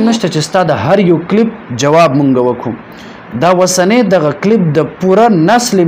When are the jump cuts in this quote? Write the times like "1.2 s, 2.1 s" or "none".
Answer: none